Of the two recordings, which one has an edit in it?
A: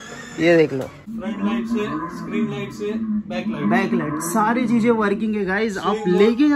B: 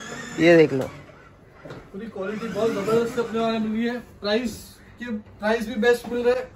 A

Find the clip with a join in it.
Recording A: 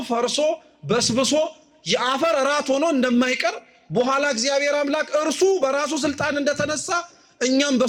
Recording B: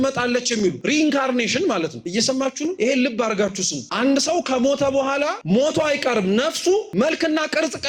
B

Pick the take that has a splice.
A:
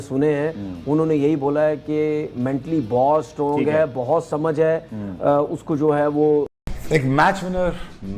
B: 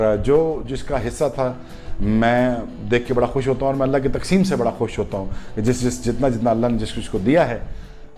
A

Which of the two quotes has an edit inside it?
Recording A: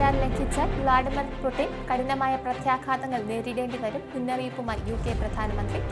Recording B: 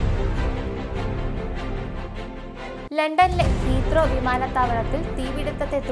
B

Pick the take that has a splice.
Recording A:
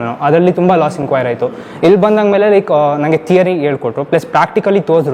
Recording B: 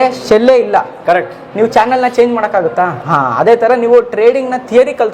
B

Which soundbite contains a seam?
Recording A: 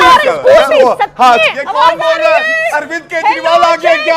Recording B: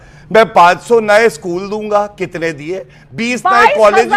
A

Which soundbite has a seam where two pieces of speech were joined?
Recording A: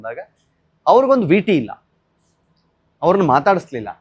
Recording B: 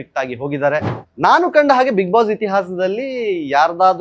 B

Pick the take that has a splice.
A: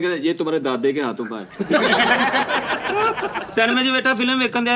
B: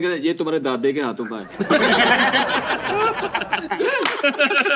A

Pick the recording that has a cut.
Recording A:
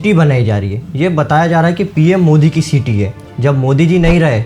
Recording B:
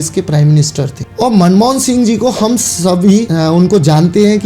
B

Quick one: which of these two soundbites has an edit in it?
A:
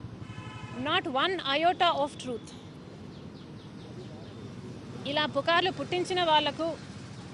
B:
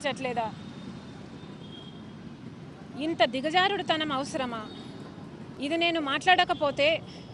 B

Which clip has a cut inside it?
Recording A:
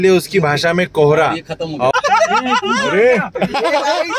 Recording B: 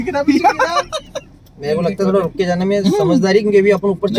A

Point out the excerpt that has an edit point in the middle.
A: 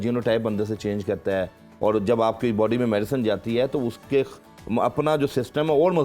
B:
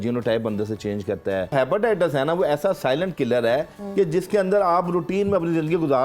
B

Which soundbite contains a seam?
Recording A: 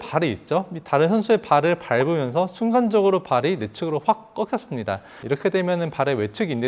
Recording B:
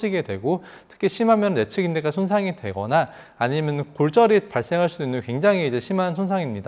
A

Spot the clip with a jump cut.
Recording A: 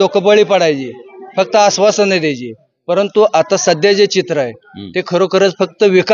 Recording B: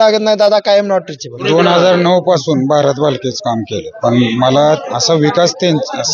B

